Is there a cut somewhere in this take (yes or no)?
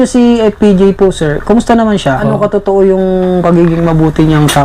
yes